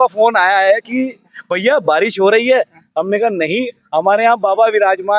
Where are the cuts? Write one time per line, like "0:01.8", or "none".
none